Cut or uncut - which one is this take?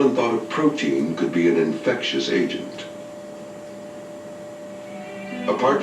cut